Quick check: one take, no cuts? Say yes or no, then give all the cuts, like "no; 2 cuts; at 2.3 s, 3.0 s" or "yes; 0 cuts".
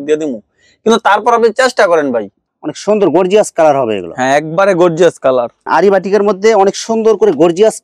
no; 2 cuts; at 2.4 s, 5.6 s